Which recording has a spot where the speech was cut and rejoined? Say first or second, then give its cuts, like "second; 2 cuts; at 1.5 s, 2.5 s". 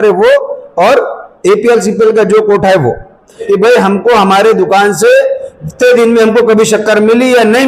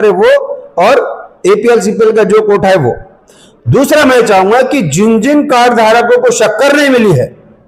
first; 1 cut; at 3.4 s